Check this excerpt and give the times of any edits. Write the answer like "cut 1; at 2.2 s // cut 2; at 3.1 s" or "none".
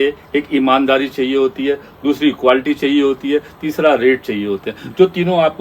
none